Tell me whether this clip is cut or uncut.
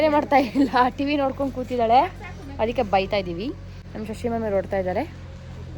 uncut